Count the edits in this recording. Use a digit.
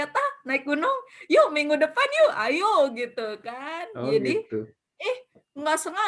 0